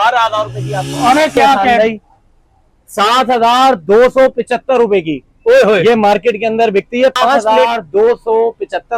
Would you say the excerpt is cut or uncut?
cut